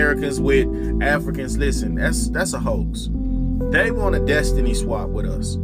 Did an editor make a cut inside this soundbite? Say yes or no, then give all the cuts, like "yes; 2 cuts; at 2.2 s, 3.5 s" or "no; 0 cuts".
no; 0 cuts